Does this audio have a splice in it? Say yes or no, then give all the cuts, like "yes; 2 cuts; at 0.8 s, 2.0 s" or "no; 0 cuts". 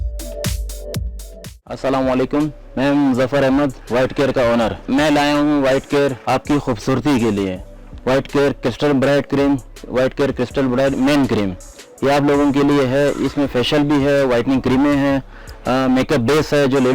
yes; 1 cut; at 1.5 s